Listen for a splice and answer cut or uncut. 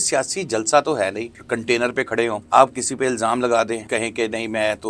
cut